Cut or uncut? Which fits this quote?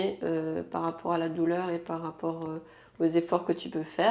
uncut